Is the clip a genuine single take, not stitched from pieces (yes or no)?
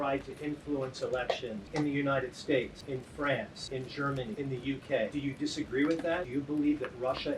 no